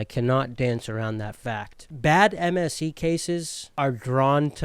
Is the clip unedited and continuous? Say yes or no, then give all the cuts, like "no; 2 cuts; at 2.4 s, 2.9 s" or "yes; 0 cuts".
no; 2 cuts; at 1.8 s, 3.6 s